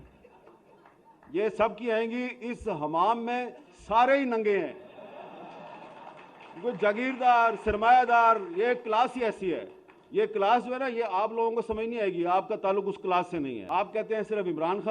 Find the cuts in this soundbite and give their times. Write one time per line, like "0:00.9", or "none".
0:13.6